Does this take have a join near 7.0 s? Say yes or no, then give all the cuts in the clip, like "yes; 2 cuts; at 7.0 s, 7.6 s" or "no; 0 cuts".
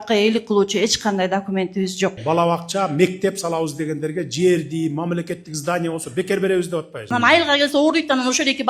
yes; 2 cuts; at 2.2 s, 7.0 s